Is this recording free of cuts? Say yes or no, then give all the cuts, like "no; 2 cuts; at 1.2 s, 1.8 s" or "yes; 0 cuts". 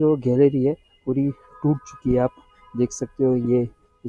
yes; 0 cuts